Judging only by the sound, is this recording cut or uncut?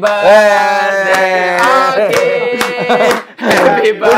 uncut